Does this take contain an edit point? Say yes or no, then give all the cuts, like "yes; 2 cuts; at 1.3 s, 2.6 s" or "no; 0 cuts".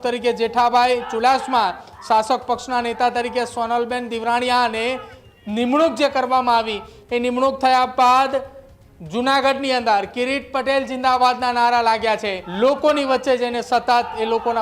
yes; 1 cut; at 12.4 s